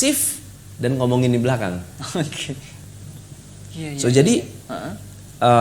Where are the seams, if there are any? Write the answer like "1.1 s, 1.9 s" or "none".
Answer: 2.7 s